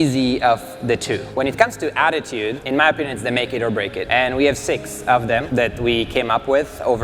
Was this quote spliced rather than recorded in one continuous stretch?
yes; 4 cuts; at 1.3 s, 2.6 s, 4.0 s, 5.5 s

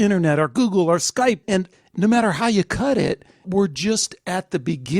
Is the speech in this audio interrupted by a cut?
yes; 2 cuts; at 1.6 s, 3.5 s

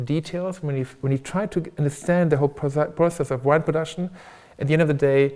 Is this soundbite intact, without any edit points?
yes; 0 cuts

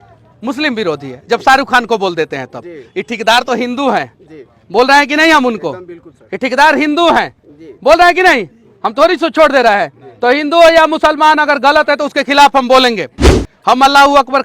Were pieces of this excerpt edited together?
no; 0 cuts

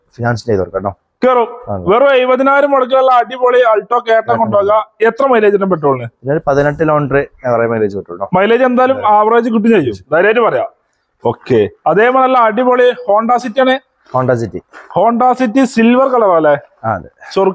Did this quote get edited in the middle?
no; 0 cuts

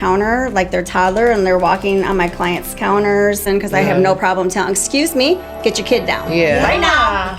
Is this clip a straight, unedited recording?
no; 1 cut; at 3.4 s

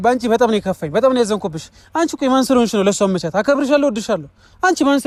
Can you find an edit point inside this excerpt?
no; 0 cuts

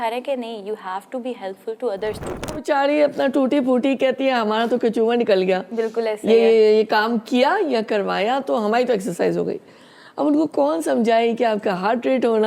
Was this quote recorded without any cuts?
no; 1 cut; at 2.6 s

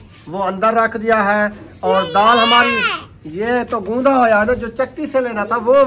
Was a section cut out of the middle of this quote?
no; 0 cuts

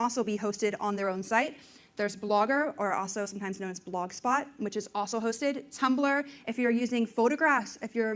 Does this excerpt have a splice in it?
yes; 1 cut; at 2.3 s

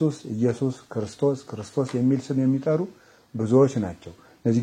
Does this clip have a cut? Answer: no; 0 cuts

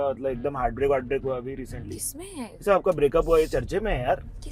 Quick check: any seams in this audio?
no; 0 cuts

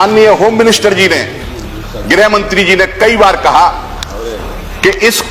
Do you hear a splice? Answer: no; 0 cuts

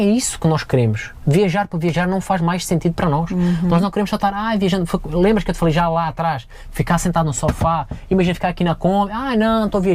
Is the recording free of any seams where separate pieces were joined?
yes; 0 cuts

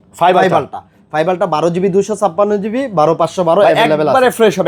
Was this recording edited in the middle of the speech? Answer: no; 0 cuts

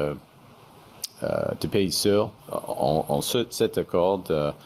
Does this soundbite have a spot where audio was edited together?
yes; 1 cut; at 2.4 s

